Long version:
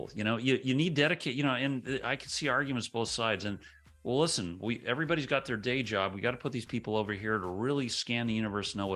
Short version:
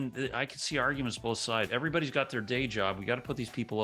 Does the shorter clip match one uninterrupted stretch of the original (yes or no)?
no